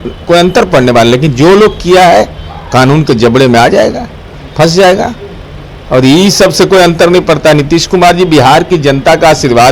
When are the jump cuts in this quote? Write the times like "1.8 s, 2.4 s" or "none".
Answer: none